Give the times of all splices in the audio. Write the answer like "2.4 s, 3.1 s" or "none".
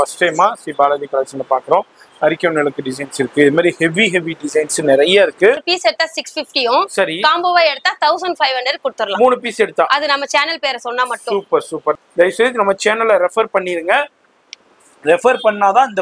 5.7 s, 12.0 s